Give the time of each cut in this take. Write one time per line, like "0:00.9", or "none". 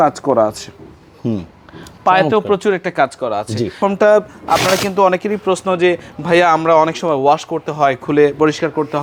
0:03.7